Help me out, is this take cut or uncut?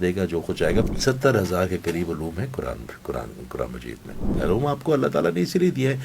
cut